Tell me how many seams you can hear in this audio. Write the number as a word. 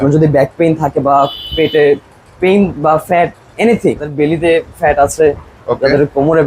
one